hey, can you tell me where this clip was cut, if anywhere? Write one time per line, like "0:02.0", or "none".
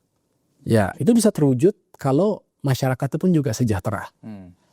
none